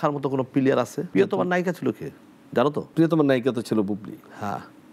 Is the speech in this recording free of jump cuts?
no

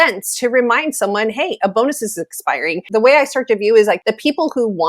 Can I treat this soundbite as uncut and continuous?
no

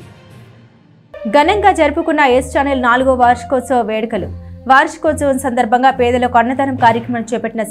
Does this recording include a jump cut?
yes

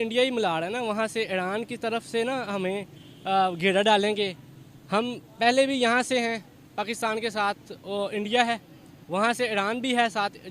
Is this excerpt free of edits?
yes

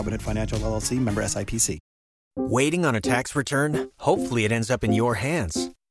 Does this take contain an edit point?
yes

